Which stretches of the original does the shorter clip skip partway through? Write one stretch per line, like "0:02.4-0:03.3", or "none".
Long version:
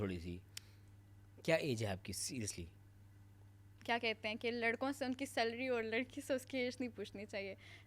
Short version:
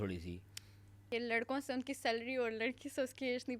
0:01.1-0:04.4